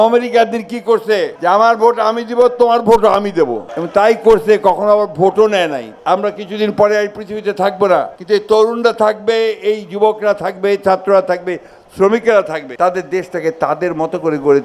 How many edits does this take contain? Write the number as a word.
four